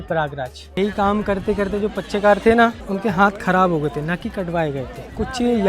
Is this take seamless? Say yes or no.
no